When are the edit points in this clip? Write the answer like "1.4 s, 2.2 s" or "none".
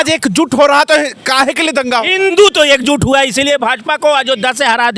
2.3 s

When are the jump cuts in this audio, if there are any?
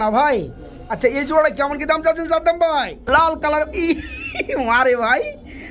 3.0 s

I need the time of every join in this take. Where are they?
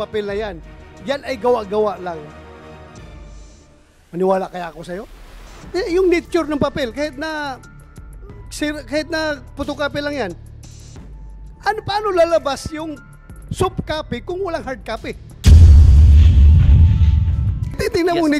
15.3 s

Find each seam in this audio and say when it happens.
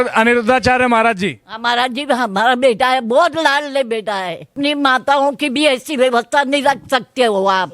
4.5 s

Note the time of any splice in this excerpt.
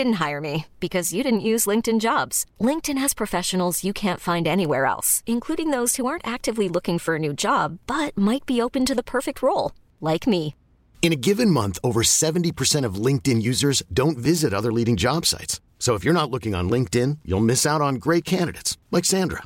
none

